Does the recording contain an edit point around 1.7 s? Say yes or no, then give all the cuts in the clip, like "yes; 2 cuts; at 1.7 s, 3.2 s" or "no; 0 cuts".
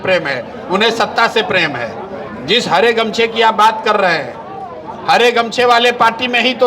no; 0 cuts